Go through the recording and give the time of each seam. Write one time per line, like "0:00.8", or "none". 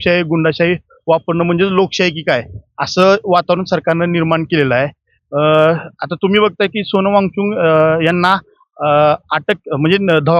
none